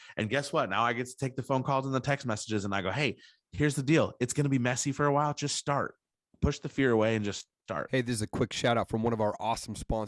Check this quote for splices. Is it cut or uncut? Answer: cut